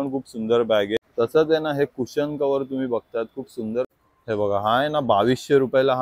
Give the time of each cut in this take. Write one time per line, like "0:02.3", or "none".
0:01.1
0:03.9